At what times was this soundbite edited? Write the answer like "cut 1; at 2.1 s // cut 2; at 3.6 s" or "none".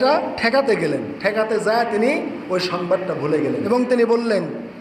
cut 1; at 3.7 s